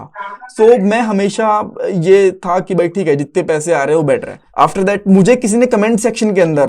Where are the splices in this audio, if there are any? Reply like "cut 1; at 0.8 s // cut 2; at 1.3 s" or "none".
cut 1; at 4.4 s